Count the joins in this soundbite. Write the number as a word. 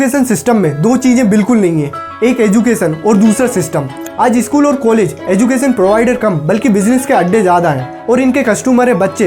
one